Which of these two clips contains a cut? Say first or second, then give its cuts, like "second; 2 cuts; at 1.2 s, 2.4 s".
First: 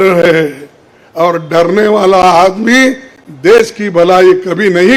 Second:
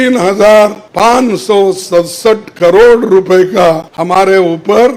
second; 2 cuts; at 0.8 s, 3.9 s